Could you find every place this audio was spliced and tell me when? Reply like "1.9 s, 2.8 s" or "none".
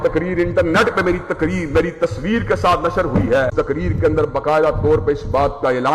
3.5 s